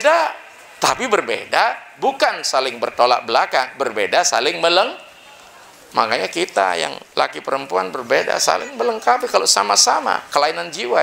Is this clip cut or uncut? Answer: uncut